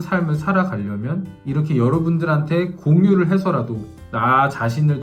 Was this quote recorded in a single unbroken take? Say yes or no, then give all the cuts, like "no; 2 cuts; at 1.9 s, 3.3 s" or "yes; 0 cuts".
yes; 0 cuts